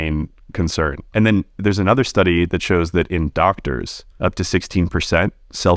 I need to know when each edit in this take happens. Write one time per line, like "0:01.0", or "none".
0:01.0
0:04.0